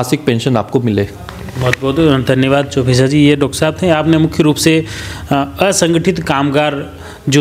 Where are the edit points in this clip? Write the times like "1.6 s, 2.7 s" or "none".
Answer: none